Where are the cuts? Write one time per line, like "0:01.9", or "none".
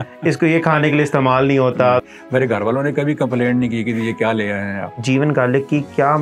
0:02.0
0:05.0